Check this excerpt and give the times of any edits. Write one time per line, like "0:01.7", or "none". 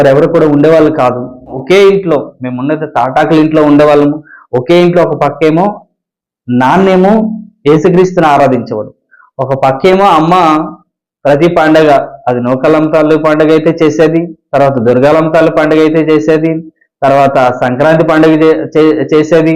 0:01.6